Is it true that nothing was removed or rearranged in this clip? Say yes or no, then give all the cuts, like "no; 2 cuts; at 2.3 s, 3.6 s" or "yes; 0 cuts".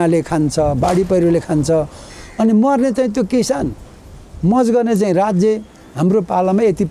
yes; 0 cuts